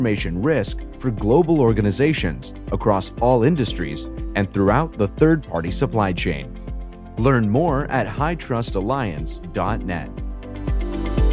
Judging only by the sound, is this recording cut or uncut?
cut